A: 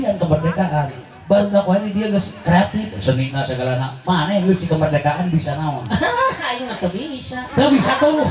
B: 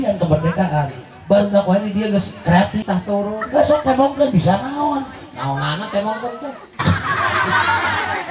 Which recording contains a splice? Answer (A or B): B